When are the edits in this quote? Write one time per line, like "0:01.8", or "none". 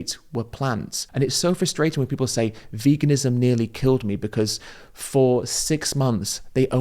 0:01.0